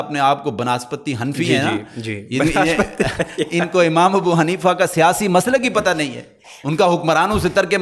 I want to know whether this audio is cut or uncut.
uncut